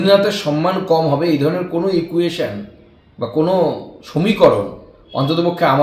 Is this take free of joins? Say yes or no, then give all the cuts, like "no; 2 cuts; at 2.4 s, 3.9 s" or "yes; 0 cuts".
yes; 0 cuts